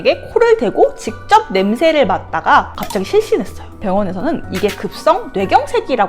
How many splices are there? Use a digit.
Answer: 1